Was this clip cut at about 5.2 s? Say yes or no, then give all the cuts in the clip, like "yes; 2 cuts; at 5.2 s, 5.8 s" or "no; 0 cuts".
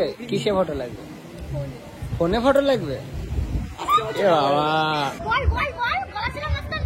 yes; 1 cut; at 5.2 s